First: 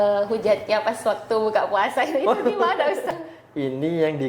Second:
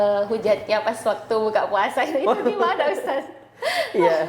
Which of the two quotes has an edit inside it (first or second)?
first